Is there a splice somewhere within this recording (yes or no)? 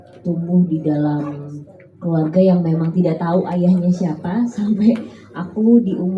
no